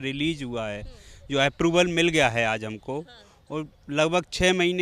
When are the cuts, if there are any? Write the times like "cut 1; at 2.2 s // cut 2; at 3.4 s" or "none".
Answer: none

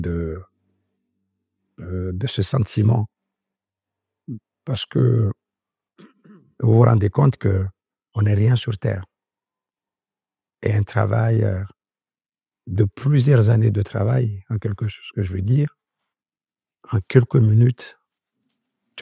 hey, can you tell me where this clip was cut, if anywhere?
none

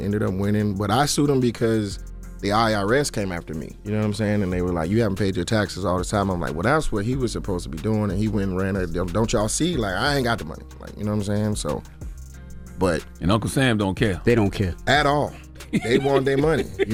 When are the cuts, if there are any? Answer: none

